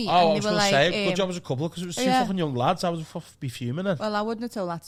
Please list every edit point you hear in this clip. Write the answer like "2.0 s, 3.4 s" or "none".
none